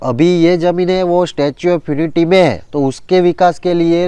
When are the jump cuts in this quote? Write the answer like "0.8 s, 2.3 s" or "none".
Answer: 2.6 s